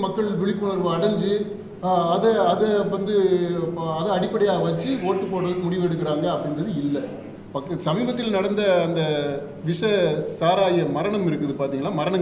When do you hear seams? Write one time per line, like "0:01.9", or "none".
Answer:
0:07.3

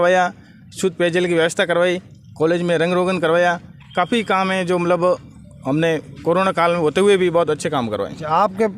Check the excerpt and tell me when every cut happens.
none

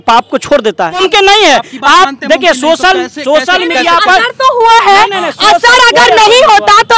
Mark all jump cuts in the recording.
0:01.0

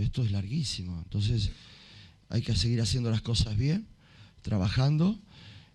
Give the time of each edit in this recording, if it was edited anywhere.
none

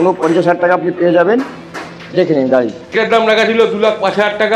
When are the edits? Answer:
0:02.9

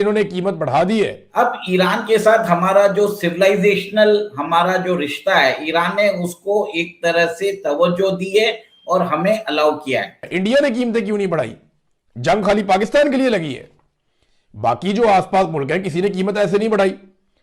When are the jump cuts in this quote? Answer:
0:01.2
0:10.2

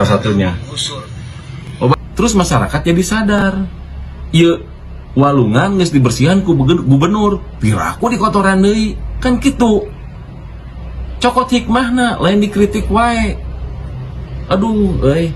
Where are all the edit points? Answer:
0:01.9

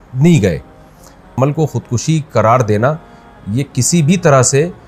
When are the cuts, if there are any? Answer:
0:01.3

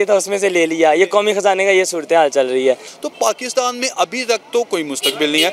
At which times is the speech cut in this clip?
0:02.9

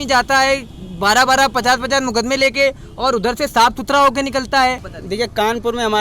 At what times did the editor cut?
0:04.9

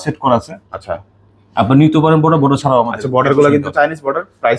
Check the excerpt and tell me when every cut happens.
none

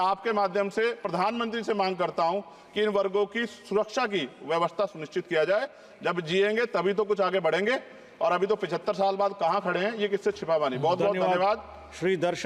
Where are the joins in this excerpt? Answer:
none

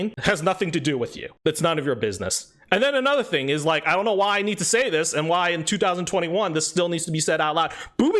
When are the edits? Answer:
0:01.2

